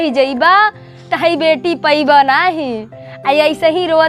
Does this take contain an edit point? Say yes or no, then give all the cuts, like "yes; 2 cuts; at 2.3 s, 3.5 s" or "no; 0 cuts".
no; 0 cuts